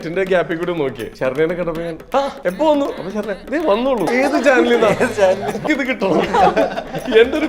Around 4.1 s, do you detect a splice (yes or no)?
yes